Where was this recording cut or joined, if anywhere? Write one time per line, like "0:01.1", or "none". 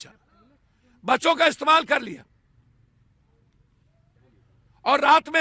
none

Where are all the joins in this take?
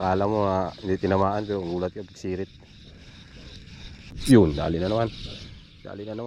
0:04.1

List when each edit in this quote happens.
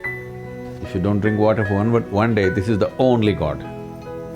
0:00.9

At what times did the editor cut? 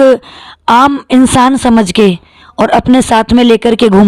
none

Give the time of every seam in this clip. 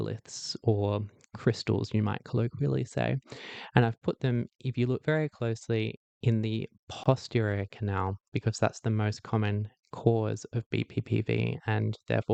none

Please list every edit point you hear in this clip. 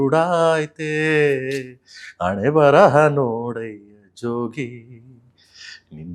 none

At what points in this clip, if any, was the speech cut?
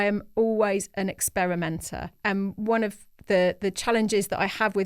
0:02.1

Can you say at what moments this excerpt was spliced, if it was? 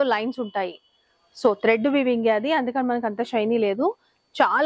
none

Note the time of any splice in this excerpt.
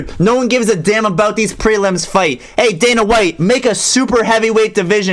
none

